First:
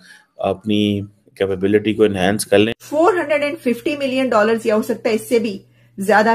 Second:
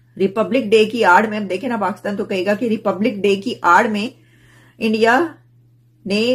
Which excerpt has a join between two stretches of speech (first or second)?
first